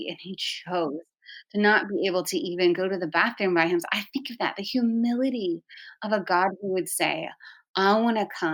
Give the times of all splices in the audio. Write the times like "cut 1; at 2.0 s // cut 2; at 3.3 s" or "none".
none